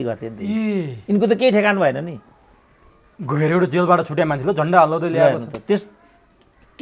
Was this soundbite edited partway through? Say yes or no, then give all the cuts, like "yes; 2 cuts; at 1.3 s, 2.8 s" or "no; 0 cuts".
no; 0 cuts